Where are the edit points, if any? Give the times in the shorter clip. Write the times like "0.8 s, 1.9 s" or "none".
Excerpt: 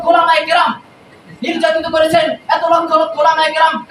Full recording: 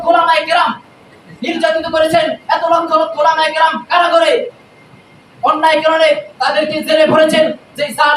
none